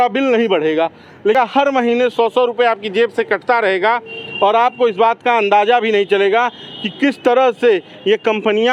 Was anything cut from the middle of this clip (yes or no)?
yes